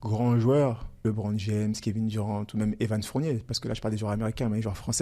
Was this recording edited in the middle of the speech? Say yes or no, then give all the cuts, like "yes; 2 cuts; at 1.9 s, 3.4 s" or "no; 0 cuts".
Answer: yes; 1 cut; at 1.0 s